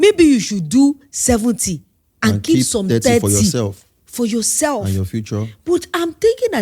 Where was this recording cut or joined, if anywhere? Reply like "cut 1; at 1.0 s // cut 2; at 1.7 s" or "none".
none